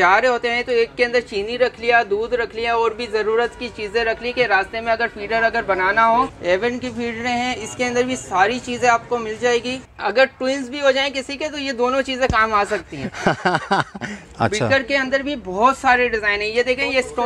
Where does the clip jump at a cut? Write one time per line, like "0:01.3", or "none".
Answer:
0:06.4
0:09.8
0:14.2